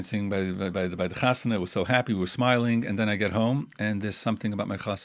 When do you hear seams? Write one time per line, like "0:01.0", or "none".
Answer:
none